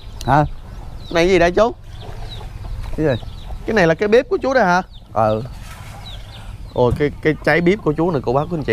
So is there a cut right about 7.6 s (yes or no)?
no